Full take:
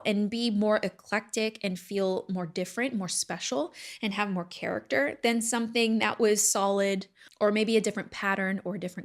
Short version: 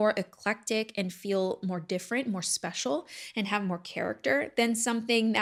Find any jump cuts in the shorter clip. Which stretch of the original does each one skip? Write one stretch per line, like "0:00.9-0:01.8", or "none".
none